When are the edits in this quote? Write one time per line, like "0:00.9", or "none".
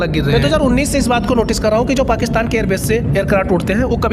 none